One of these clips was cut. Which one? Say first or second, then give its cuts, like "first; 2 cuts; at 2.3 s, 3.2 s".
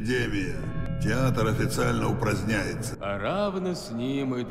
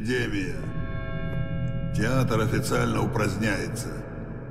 first; 2 cuts; at 0.9 s, 2.9 s